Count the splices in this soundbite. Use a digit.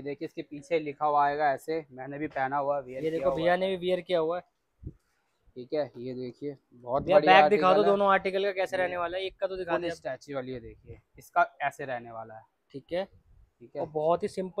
0